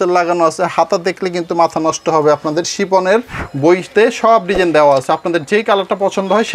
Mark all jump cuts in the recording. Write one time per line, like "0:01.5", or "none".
0:03.4